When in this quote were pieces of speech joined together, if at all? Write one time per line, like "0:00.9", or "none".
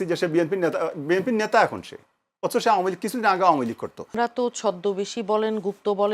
0:04.1